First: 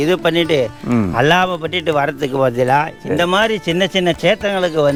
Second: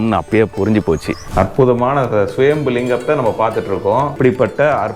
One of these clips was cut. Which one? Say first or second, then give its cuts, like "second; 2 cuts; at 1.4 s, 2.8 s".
second; 2 cuts; at 1.2 s, 4.2 s